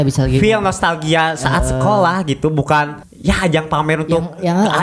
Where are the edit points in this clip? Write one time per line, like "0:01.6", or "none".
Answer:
0:03.0